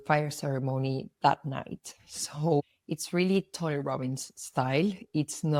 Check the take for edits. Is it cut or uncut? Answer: uncut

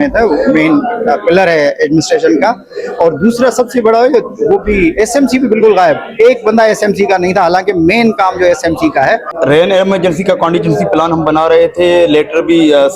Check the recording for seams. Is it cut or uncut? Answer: cut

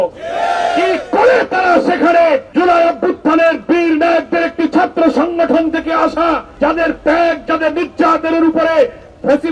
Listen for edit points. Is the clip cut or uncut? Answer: cut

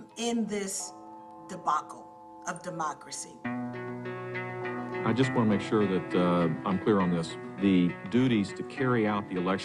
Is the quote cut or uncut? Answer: uncut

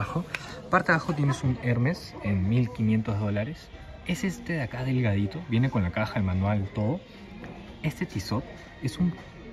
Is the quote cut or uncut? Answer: uncut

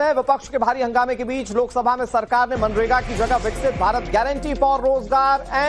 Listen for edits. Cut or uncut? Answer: cut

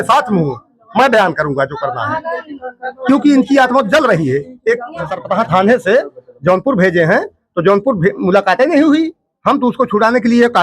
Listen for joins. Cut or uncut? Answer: cut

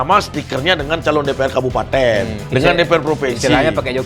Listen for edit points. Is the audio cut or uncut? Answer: cut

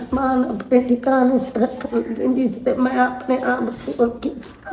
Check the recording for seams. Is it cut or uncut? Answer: uncut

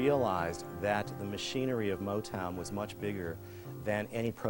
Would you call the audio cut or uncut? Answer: uncut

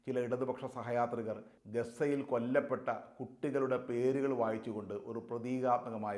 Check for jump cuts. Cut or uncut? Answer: cut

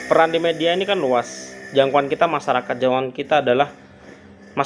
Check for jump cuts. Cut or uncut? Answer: uncut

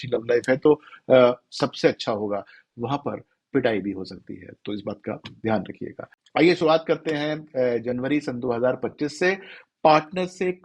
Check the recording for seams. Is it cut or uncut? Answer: uncut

